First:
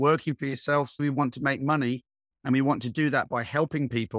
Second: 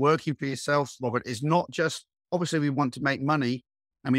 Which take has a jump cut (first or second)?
first